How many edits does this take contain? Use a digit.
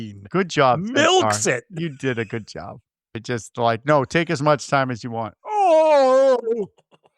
1